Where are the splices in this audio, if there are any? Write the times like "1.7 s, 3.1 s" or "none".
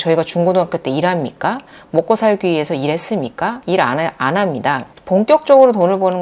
4.9 s

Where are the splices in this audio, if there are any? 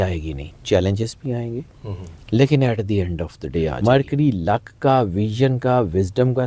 3.8 s

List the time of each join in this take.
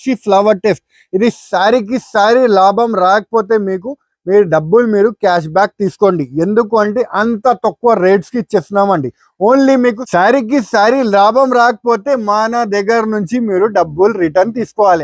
10.0 s

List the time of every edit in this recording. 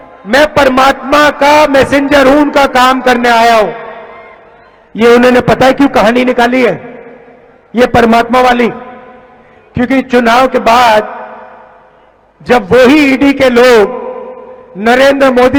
none

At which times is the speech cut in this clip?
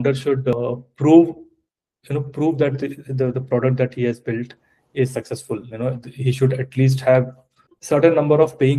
none

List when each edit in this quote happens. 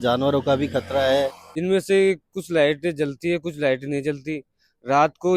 1.4 s

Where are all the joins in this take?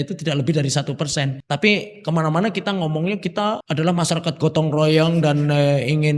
1.4 s, 3.6 s

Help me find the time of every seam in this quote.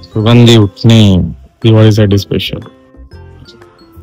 2.7 s

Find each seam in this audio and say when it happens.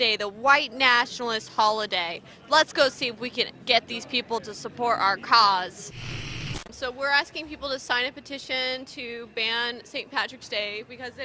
7.8 s

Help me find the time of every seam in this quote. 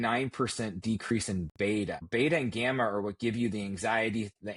2.0 s

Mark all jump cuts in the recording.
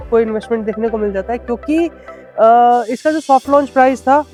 none

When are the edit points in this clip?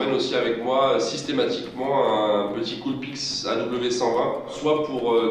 2.3 s

